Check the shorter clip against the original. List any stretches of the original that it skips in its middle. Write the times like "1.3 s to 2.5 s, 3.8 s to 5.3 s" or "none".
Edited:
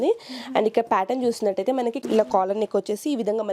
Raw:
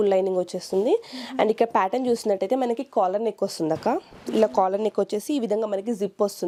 2.8 s to 4.2 s